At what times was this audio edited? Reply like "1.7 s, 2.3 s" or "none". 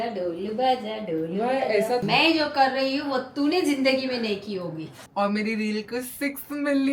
2.0 s, 4.9 s